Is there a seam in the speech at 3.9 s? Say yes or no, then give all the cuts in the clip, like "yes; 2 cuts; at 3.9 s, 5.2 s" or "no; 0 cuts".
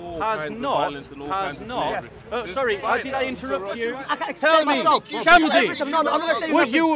yes; 1 cut; at 3.9 s